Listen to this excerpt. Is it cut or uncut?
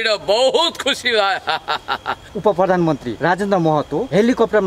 cut